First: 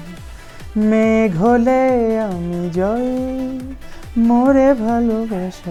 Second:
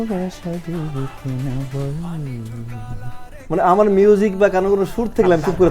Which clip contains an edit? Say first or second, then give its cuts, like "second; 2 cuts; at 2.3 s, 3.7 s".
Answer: second; 1 cut; at 3.4 s